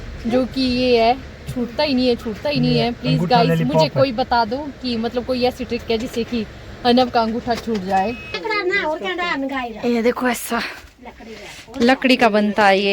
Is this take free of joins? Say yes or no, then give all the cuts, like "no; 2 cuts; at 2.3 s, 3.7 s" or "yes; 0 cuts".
no; 1 cut; at 8.3 s